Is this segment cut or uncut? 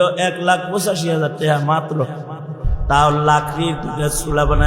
cut